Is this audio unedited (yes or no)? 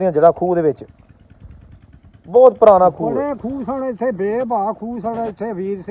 no